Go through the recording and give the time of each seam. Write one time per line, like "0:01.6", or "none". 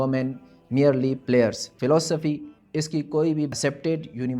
0:01.7